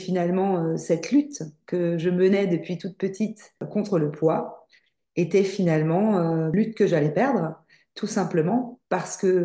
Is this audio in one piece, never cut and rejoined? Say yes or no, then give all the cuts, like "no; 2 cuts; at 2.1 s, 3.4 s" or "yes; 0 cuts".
no; 2 cuts; at 3.6 s, 6.5 s